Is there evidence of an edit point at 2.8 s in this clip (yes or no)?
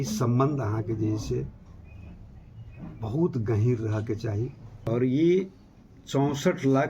no